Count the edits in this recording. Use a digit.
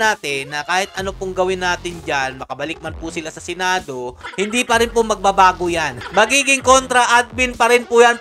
1